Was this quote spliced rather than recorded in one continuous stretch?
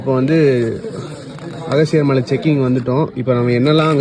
no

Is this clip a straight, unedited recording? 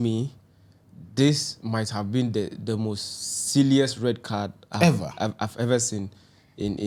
yes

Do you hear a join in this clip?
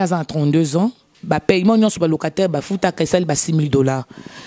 yes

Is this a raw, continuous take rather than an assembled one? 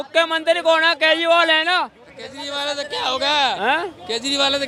yes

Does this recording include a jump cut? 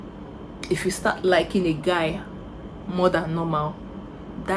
no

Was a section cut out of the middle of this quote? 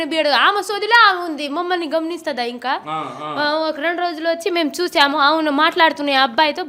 no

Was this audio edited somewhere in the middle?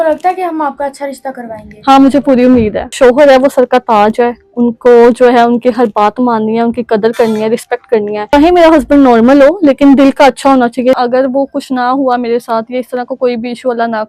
yes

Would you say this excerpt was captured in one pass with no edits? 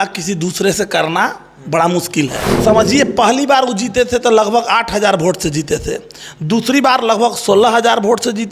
no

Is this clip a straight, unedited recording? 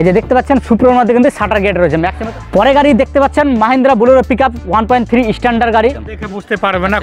no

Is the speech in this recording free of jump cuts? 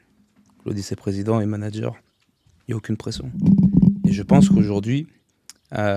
yes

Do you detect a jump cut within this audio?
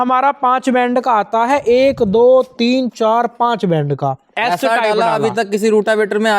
no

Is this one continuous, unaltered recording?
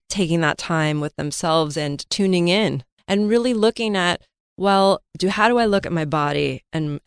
no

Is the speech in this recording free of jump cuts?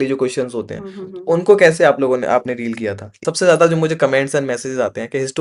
no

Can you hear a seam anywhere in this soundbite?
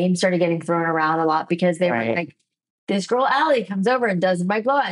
no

